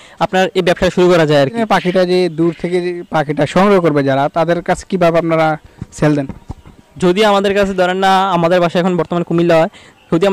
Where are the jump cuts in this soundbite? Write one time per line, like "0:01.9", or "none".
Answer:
0:01.6